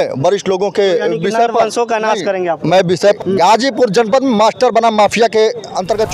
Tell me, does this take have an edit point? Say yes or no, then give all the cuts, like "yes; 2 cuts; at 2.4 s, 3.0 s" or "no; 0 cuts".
yes; 1 cut; at 3.2 s